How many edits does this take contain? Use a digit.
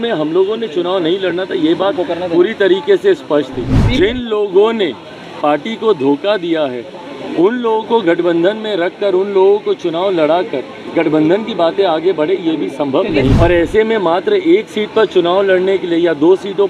2